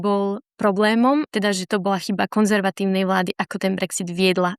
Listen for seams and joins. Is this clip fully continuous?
no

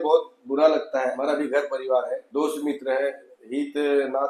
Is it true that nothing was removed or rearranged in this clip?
no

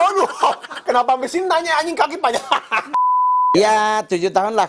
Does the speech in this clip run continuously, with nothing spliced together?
no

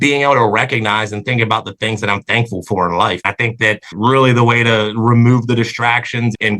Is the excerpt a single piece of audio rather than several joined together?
no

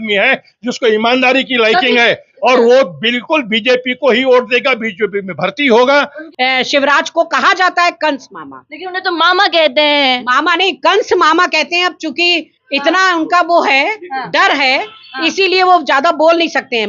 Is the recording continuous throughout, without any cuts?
no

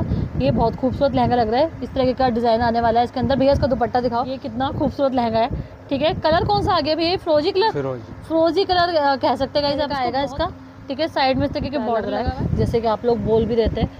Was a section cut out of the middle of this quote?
yes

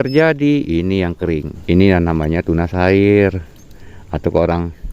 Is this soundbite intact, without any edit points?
no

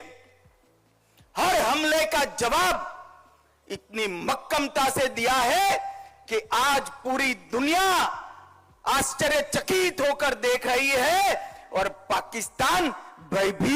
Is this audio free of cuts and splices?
yes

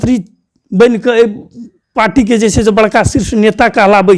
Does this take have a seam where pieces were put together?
no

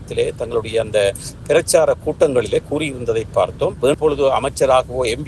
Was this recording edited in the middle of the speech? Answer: yes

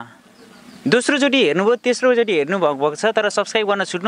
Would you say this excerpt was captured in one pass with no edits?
yes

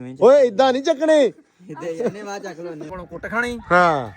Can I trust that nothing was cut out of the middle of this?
no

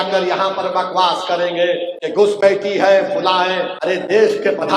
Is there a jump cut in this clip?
yes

